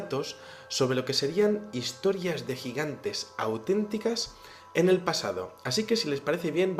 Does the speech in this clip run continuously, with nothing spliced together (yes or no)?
no